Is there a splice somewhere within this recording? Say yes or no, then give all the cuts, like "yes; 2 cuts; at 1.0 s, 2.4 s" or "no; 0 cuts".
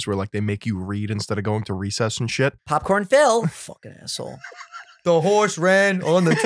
yes; 1 cut; at 2.6 s